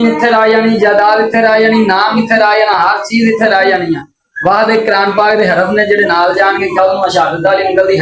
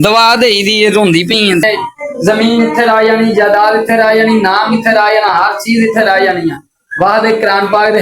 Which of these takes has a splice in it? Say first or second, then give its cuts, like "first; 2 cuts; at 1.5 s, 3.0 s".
second; 1 cut; at 1.6 s